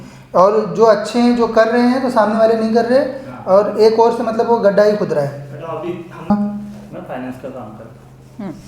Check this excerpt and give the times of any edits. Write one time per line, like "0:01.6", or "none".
0:06.3